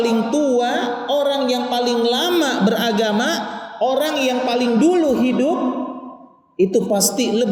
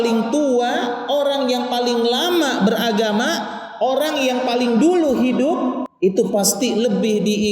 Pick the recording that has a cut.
second; 1 cut; at 5.9 s

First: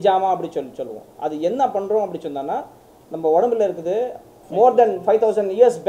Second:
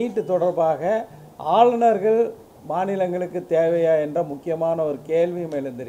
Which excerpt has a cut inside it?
first; 1 cut; at 4.4 s

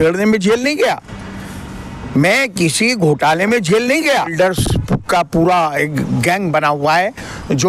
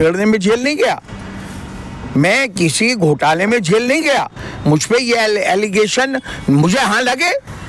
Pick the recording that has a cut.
first; 1 cut; at 4.3 s

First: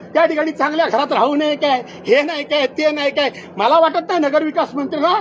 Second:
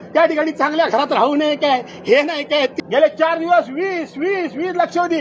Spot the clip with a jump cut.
second; 1 cut; at 2.7 s

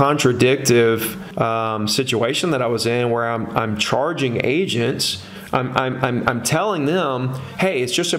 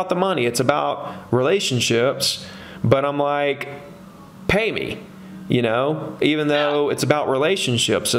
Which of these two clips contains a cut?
first; 1 cut; at 1.2 s

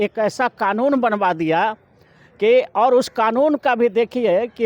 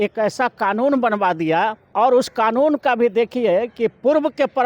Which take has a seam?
second; 1 cut; at 1.9 s

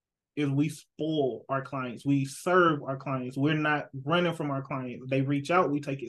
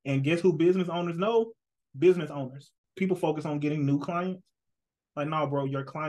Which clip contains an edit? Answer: second; 1 cut; at 2.8 s

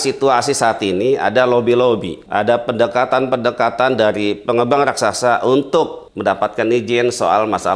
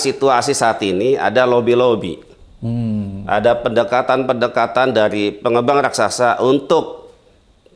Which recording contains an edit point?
first; 2 cuts; at 2.2 s, 6.0 s

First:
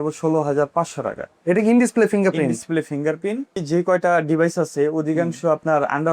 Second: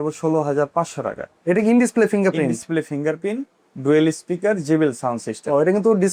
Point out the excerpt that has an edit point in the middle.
first; 1 cut; at 3.6 s

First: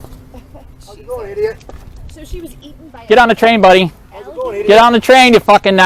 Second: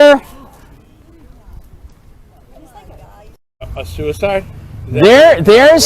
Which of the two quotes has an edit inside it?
second; 1 cut; at 3.8 s

